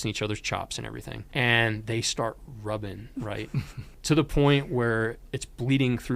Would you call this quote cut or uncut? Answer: cut